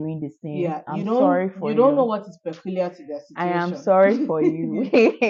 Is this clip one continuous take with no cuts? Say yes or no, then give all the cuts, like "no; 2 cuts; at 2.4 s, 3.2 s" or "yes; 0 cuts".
yes; 0 cuts